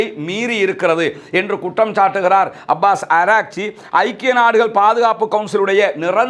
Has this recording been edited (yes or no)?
no